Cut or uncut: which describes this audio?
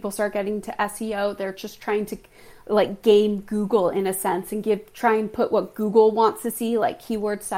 uncut